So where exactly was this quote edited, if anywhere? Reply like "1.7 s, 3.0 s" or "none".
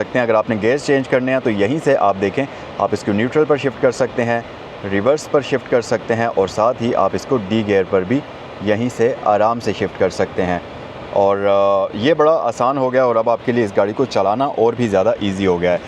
none